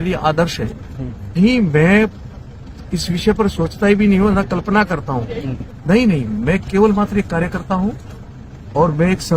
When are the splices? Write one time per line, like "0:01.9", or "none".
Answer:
0:01.2
0:05.8